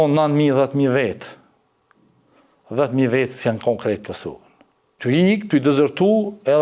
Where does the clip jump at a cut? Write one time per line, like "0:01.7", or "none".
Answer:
0:04.9

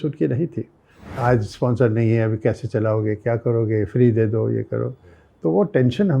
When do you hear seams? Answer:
0:01.1

